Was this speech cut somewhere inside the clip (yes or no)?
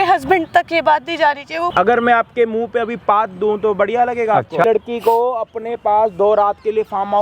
yes